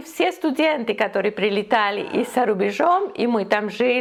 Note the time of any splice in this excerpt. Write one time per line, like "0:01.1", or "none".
none

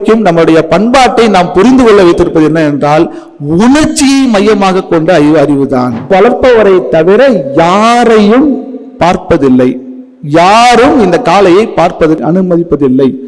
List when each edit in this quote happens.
0:06.0

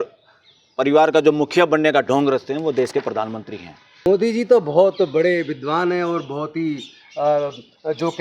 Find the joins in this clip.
0:04.0

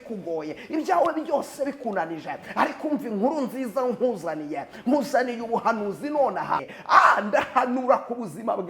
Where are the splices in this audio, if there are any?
0:06.7

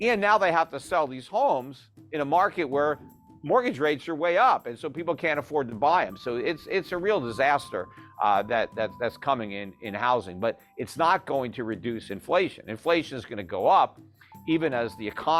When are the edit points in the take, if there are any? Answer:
none

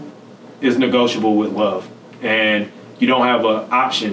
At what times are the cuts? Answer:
none

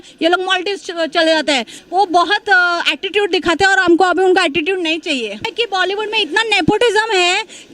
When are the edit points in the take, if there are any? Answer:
0:01.8
0:05.5

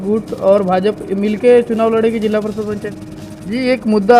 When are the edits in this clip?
0:02.9

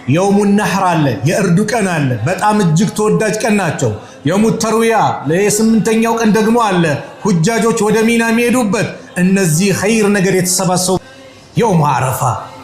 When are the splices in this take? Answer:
0:11.0

